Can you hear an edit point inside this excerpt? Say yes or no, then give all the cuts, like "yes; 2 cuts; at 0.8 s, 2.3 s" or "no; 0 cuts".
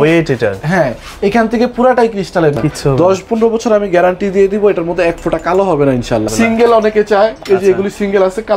yes; 2 cuts; at 2.6 s, 6.3 s